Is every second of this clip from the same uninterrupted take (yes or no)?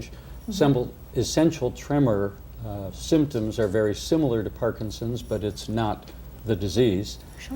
no